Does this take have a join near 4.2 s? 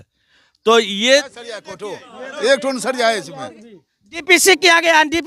no; 1 cut; at 1.3 s

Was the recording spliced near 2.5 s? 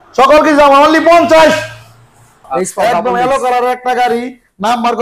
yes; 1 cut; at 2.5 s

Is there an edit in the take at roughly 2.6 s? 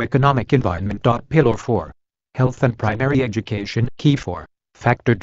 no; 2 cuts; at 1.2 s, 3.9 s

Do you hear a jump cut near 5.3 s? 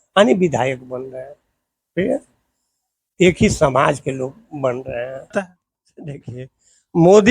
yes; 1 cut; at 5.3 s

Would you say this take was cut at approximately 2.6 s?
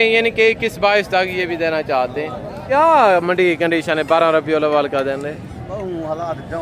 yes; 1 cut; at 2.6 s

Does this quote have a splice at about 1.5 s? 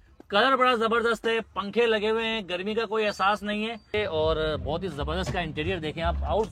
no; 1 cut; at 3.9 s

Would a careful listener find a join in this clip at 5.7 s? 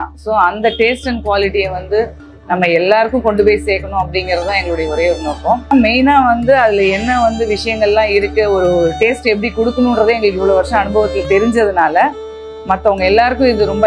yes; 1 cut; at 5.7 s

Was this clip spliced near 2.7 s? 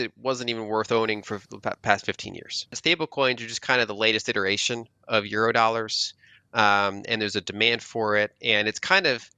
yes; 1 cut; at 2.7 s

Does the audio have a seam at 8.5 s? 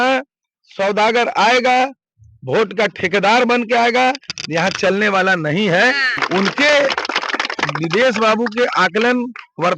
no; 1 cut; at 6.1 s

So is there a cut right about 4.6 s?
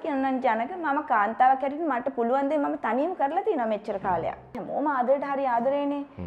yes; 1 cut; at 4.6 s

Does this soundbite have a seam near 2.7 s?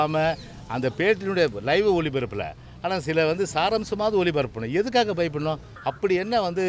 no; 1 cut; at 5.7 s

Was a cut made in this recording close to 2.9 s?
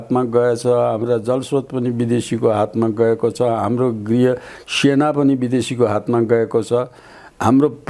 no; 0 cuts

